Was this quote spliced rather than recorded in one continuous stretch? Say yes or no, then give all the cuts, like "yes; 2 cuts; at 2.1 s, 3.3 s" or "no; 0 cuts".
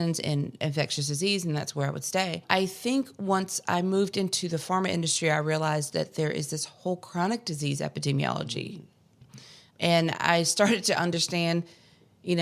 yes; 1 cut; at 2.4 s